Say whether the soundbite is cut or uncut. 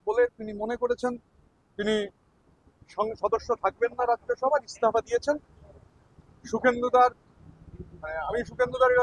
uncut